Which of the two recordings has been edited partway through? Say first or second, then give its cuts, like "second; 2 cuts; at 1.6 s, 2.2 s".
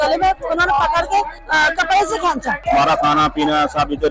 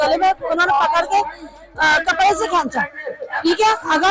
first; 2 cuts; at 1.4 s, 2.6 s